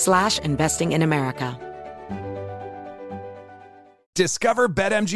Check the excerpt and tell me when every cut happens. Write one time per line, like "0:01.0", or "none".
0:01.6